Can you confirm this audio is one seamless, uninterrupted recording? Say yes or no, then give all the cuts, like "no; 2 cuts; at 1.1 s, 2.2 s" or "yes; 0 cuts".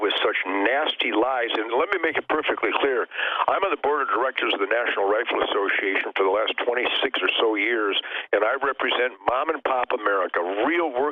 no; 1 cut; at 1.7 s